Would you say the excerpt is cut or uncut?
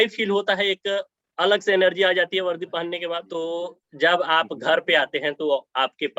cut